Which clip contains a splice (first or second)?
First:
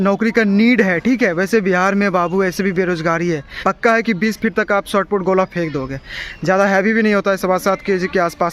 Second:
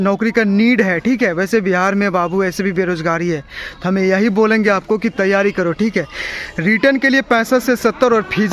first